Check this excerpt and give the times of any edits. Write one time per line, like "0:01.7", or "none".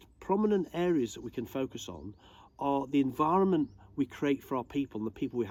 none